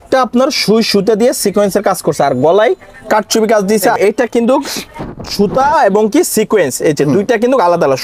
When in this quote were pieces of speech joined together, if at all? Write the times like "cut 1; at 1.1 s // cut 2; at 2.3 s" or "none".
cut 1; at 3.9 s